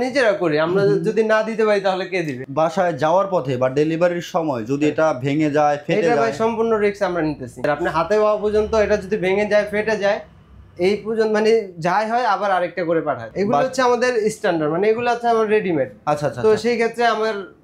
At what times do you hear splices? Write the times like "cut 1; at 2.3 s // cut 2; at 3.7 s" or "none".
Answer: cut 1; at 2.4 s // cut 2; at 7.6 s // cut 3; at 13.3 s